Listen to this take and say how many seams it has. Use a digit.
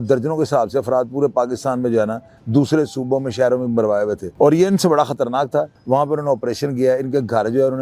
2